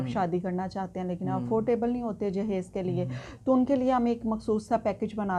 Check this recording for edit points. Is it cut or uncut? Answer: uncut